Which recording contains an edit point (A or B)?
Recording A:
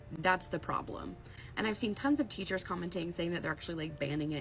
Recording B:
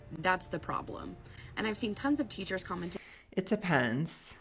A